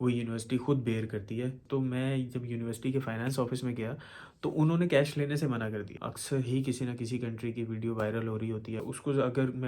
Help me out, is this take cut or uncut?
cut